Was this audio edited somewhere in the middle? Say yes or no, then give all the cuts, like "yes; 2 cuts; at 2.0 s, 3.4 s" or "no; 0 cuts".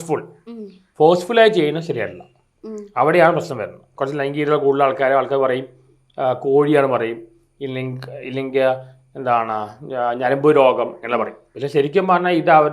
yes; 1 cut; at 3.9 s